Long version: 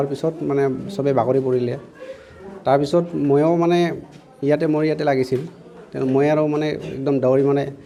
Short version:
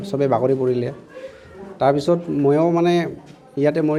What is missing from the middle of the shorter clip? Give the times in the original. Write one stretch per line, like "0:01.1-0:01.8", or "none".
none